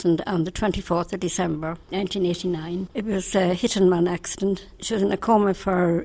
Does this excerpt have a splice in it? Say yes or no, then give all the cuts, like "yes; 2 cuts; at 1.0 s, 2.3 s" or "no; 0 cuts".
yes; 3 cuts; at 1.8 s, 2.9 s, 4.7 s